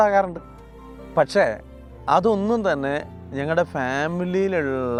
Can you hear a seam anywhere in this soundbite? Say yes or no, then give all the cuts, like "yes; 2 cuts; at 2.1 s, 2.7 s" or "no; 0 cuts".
no; 0 cuts